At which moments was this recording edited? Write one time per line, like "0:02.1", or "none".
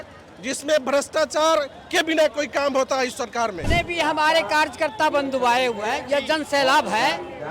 0:03.6